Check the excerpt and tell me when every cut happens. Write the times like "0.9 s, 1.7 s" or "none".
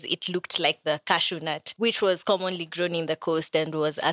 1.6 s